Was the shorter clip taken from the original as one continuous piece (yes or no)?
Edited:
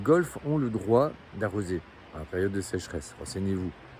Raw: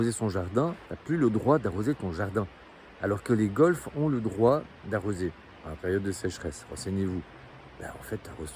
yes